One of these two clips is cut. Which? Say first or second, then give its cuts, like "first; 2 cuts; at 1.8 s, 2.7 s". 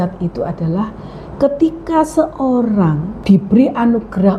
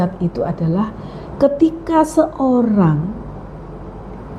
first; 1 cut; at 3.1 s